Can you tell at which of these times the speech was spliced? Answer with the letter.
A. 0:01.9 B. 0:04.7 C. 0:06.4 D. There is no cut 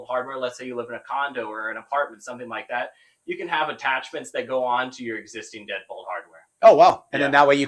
D